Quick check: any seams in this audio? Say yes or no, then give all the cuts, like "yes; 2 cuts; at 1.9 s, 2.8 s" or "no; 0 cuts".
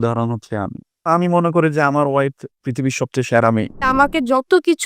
yes; 2 cuts; at 1.1 s, 3.9 s